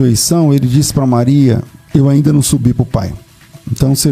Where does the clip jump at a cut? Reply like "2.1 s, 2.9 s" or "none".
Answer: 1.7 s